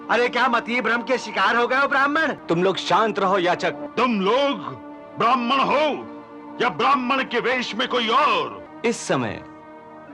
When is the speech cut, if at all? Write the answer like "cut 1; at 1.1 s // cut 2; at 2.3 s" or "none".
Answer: cut 1; at 2.4 s // cut 2; at 3.8 s // cut 3; at 8.6 s